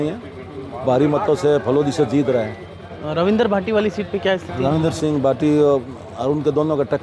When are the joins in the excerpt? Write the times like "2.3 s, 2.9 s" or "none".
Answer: none